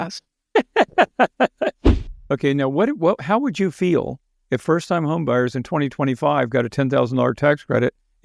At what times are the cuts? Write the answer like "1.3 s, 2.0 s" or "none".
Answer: 1.9 s